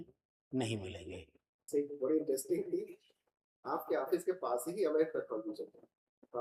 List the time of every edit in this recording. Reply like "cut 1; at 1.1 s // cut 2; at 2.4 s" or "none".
cut 1; at 1.7 s